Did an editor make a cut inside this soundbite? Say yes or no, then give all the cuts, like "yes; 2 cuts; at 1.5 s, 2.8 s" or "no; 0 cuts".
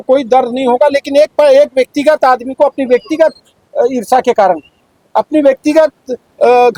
no; 0 cuts